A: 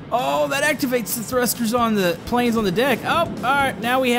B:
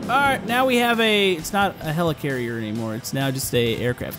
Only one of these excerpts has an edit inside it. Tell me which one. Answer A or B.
A